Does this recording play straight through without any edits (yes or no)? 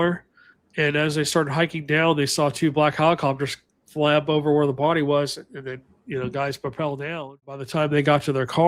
no